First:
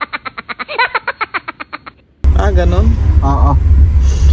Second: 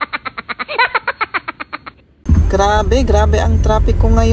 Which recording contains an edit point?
second; 1 cut; at 2.1 s

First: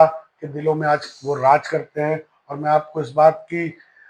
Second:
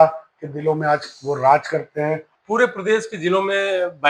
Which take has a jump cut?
second; 1 cut; at 2.3 s

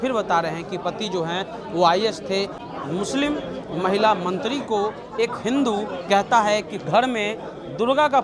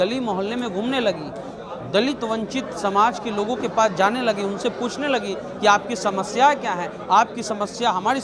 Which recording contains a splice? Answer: first; 1 cut; at 2.6 s

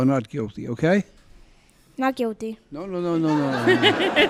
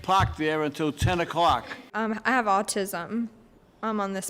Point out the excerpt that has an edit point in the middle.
second; 1 cut; at 1.8 s

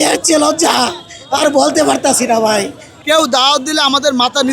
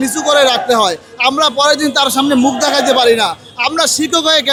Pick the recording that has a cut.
first; 1 cut; at 2.9 s

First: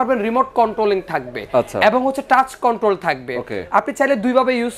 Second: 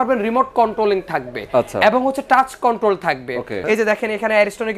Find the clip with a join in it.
second; 1 cut; at 3.6 s

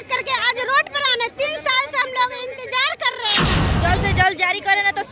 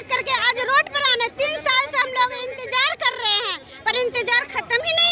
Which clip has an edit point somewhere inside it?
first; 1 cut; at 3.6 s

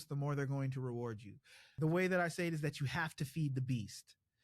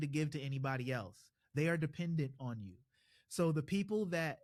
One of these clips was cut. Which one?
first; 1 cut; at 1.6 s

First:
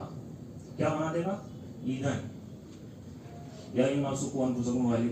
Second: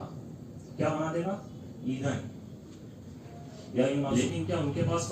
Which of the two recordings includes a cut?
second; 1 cut; at 4.1 s

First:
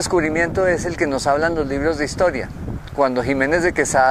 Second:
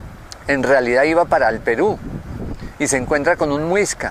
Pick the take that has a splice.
second; 1 cut; at 1.3 s

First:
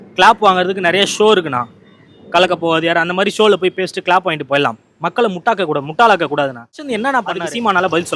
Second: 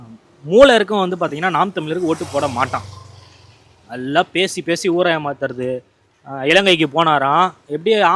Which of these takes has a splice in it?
first; 1 cut; at 7.0 s

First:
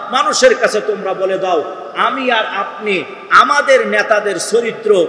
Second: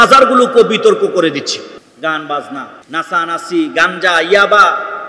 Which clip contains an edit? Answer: second; 2 cuts; at 1.8 s, 2.8 s

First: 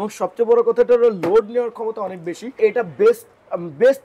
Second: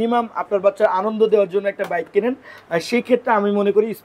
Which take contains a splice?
first; 1 cut; at 2.6 s

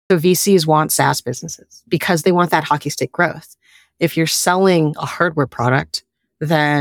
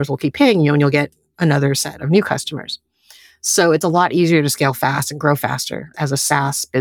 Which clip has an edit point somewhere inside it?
first; 1 cut; at 1.8 s

